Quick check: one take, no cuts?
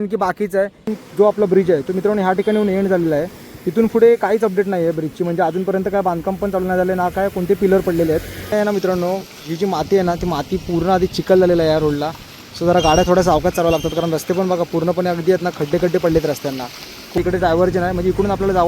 no; 3 cuts; at 0.9 s, 8.5 s, 17.2 s

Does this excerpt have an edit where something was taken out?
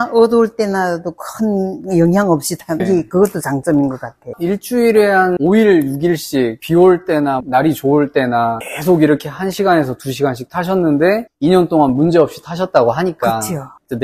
yes; 3 cuts; at 2.8 s, 5.4 s, 8.7 s

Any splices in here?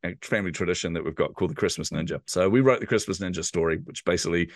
yes; 1 cut; at 2.2 s

